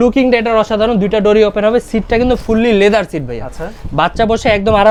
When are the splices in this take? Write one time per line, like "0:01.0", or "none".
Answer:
none